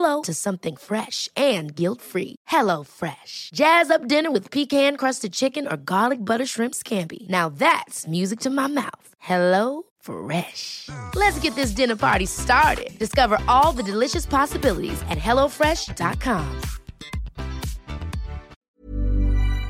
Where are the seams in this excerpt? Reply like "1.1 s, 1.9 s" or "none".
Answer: 18.6 s